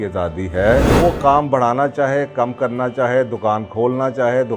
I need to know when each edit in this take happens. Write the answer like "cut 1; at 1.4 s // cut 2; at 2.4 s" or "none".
cut 1; at 0.9 s